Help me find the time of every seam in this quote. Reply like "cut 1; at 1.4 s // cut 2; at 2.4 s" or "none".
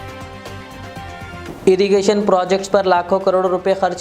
cut 1; at 1.4 s